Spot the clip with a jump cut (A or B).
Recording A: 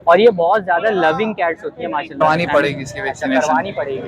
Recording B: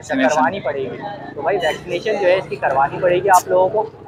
A